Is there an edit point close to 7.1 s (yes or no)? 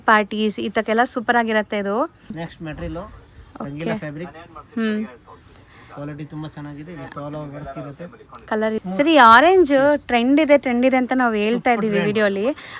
no